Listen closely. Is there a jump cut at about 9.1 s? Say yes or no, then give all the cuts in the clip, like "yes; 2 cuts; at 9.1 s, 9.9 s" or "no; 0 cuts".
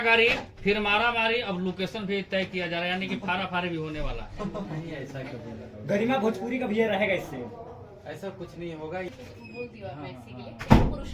yes; 1 cut; at 9.1 s